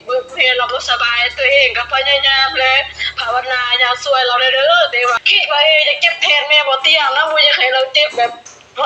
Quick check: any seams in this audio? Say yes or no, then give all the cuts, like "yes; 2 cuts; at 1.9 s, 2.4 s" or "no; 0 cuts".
yes; 1 cut; at 5.2 s